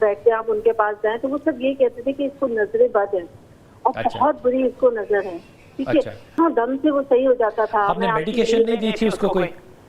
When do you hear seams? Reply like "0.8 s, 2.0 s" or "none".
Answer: 6.2 s